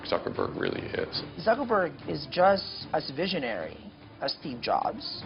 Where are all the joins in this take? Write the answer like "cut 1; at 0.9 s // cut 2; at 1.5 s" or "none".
cut 1; at 1.2 s // cut 2; at 2.7 s